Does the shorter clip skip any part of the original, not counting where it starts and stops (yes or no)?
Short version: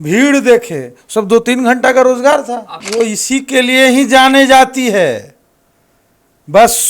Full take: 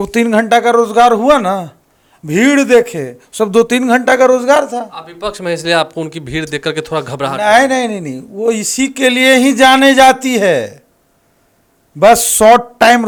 yes